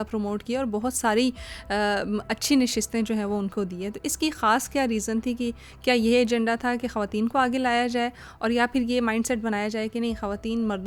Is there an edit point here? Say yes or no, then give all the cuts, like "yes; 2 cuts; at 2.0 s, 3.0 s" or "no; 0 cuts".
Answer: no; 0 cuts